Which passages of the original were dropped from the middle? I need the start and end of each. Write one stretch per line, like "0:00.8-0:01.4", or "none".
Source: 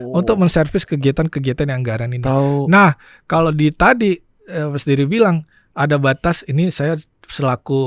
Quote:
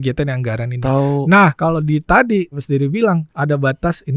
0:03.0-0:03.3
0:04.3-0:04.7
0:05.5-0:05.7